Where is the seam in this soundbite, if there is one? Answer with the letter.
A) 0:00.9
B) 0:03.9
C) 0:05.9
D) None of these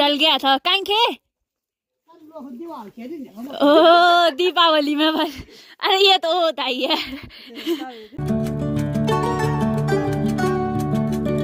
D